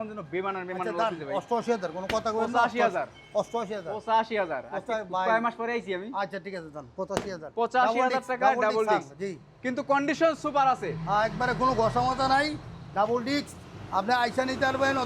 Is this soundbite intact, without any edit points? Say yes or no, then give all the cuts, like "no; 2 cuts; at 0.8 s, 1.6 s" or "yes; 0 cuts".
yes; 0 cuts